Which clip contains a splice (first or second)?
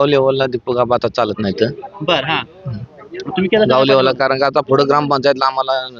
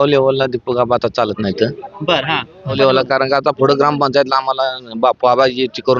second